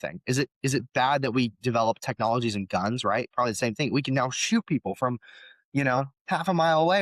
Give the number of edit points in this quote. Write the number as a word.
zero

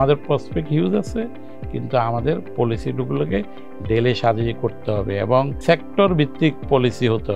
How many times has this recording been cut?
one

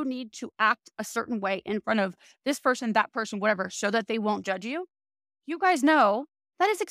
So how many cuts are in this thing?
zero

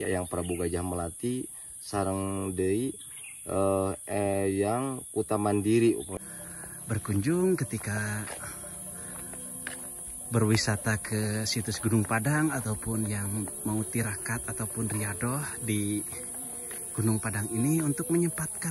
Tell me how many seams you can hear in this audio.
one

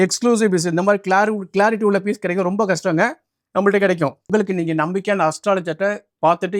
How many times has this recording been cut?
one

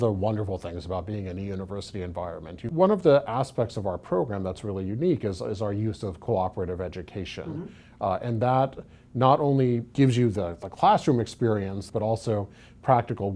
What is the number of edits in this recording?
three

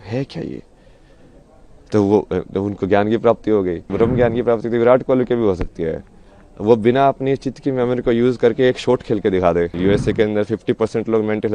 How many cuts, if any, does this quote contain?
two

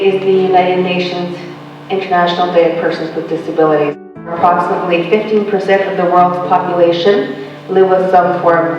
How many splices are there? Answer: one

